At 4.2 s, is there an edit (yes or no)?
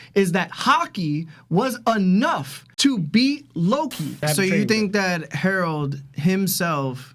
yes